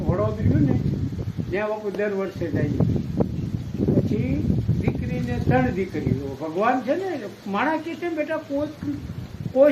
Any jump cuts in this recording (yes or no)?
no